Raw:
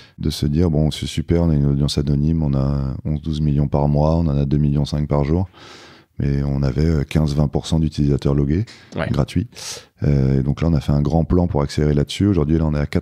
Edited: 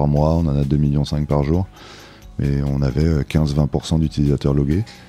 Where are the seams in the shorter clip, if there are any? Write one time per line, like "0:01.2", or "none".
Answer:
none